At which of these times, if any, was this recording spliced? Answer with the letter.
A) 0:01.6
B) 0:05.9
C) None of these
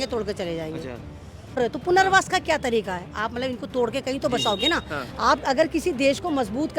A